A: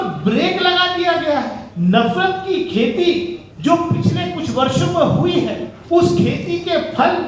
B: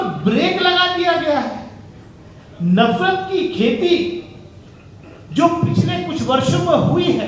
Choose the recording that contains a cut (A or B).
A